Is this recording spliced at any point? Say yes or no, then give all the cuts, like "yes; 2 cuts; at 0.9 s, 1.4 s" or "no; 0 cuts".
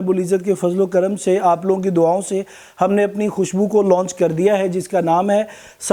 no; 0 cuts